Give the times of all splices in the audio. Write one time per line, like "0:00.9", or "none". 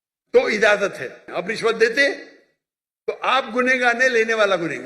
0:01.3